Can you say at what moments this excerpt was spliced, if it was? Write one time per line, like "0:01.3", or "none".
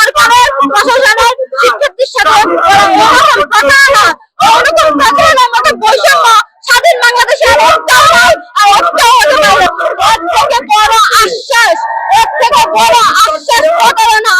0:09.7